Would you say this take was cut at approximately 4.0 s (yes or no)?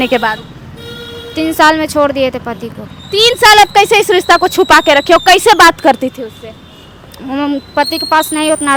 no